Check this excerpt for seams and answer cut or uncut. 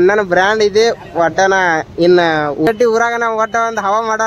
cut